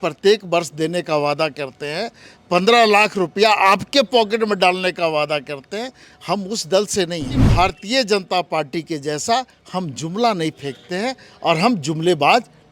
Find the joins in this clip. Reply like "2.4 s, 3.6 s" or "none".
7.3 s